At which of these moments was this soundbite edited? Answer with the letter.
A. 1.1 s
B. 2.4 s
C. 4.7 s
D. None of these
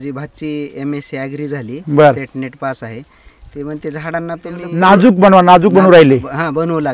C